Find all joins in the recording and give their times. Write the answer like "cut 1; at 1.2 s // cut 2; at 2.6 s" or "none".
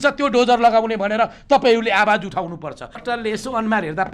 cut 1; at 3.0 s